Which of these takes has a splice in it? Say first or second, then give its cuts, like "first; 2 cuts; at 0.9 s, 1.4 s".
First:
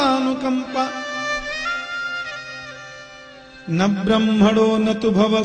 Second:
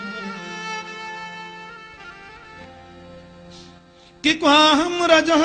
second; 1 cut; at 2.6 s